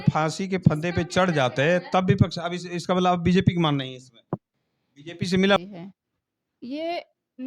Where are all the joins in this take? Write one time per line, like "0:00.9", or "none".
0:05.6